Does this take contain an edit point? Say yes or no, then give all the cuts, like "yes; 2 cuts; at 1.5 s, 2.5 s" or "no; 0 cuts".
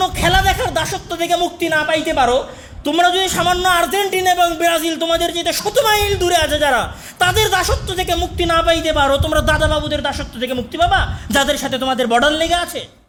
no; 0 cuts